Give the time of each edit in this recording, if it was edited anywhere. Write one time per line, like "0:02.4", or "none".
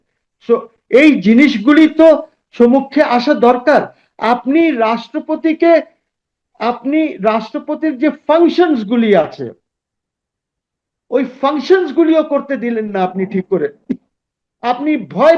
none